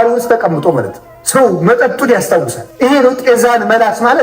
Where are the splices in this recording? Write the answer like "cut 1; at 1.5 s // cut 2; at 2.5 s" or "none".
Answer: cut 1; at 1.0 s // cut 2; at 2.6 s